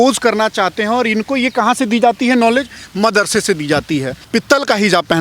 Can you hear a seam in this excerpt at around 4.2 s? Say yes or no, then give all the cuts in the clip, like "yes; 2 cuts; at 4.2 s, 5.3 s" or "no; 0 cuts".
yes; 1 cut; at 4.2 s